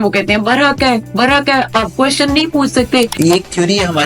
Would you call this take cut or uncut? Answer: cut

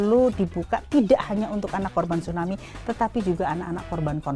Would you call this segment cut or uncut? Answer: uncut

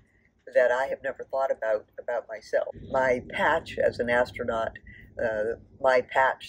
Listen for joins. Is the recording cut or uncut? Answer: cut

